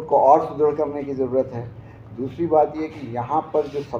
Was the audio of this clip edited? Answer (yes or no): no